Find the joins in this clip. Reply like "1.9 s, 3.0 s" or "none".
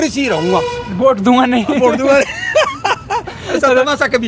none